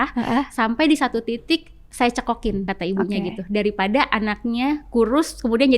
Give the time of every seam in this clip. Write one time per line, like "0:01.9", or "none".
0:02.7